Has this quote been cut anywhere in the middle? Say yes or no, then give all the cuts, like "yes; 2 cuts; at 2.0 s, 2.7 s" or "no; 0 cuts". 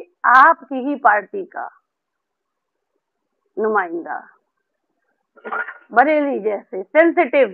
no; 0 cuts